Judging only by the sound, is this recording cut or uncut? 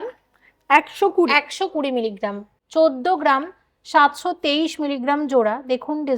cut